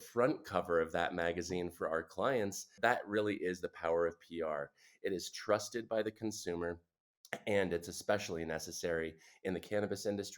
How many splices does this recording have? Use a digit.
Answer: 1